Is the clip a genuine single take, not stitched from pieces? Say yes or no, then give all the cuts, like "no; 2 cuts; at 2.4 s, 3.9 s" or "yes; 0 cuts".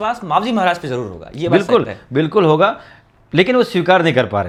yes; 0 cuts